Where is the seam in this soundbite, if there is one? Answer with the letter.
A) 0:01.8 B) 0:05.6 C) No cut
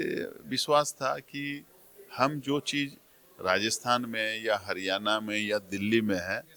C